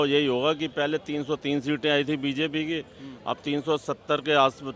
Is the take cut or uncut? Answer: uncut